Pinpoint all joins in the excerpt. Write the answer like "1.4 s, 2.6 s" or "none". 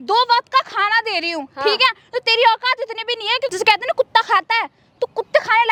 none